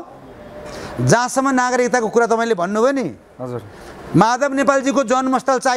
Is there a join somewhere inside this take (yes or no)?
no